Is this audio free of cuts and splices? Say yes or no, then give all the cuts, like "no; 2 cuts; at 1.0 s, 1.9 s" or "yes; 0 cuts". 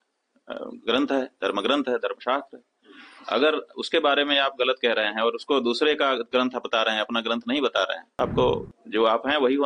no; 1 cut; at 8.1 s